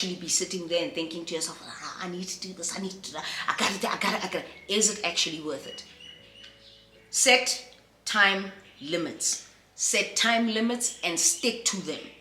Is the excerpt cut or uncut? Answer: uncut